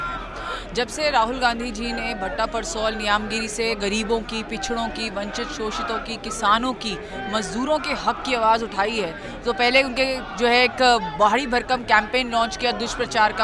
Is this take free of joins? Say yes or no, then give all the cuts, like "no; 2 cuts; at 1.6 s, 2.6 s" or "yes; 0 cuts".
yes; 0 cuts